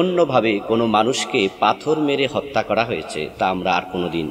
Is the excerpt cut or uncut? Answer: uncut